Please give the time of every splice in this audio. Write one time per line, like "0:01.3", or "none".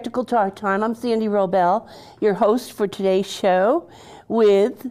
none